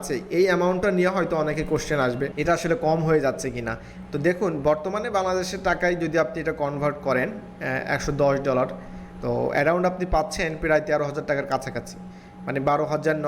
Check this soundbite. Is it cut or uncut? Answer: cut